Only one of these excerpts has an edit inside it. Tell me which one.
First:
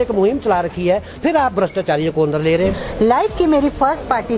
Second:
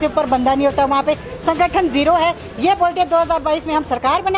first; 1 cut; at 2.8 s

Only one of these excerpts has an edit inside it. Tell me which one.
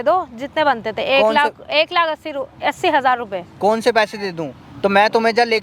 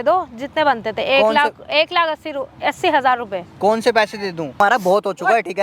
second; 1 cut; at 4.5 s

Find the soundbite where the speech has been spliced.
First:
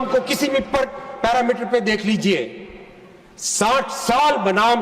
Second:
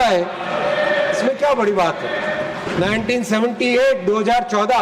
second; 1 cut; at 2.7 s

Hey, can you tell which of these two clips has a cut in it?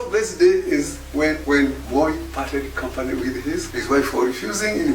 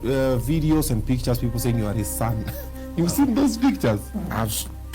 first; 2 cuts; at 1.6 s, 3.7 s

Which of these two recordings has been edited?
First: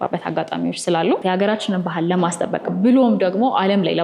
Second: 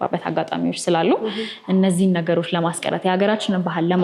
first; 1 cut; at 1.2 s

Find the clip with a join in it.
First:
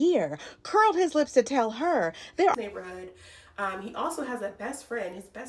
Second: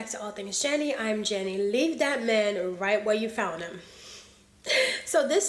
first; 1 cut; at 2.5 s

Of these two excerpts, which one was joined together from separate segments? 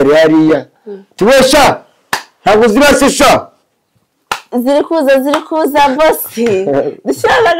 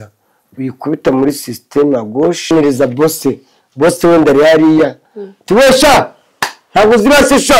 second; 1 cut; at 2.5 s

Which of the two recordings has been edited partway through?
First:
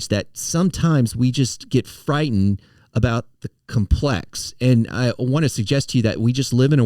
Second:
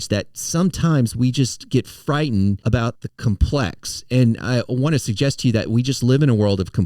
second; 1 cut; at 2.8 s

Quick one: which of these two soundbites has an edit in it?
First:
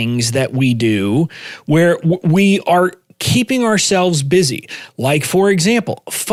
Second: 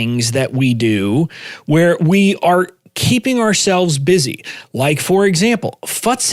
second; 1 cut; at 2.0 s

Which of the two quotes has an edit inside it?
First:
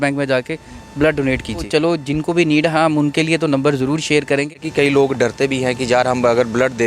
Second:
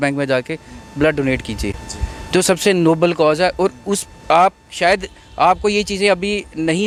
first; 2 cuts; at 1.7 s, 4.6 s

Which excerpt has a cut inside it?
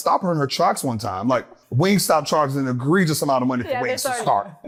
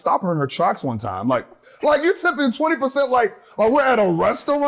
second; 1 cut; at 1.6 s

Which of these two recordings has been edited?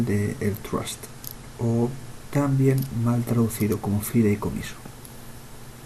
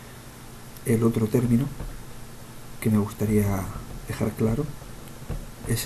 first; 1 cut; at 4.1 s

